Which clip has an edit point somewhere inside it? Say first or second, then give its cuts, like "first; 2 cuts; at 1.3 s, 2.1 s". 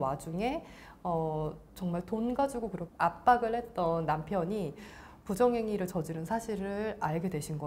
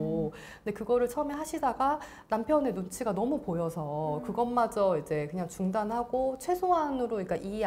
first; 1 cut; at 2.9 s